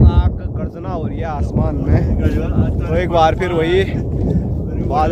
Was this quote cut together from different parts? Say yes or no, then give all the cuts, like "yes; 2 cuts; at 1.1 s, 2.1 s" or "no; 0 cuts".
no; 0 cuts